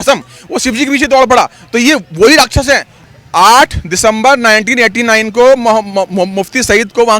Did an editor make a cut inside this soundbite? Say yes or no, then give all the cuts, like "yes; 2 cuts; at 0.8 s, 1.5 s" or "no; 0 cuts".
yes; 1 cut; at 2.9 s